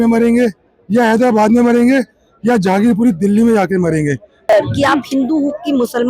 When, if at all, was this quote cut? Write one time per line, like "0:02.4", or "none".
0:04.4